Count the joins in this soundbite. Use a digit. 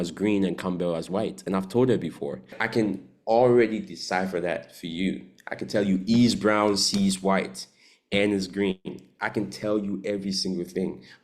1